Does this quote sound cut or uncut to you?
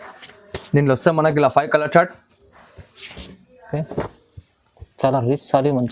uncut